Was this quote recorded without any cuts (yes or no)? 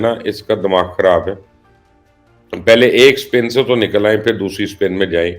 yes